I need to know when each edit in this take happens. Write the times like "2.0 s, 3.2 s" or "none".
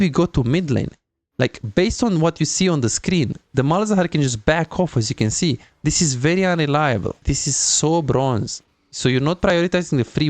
7.1 s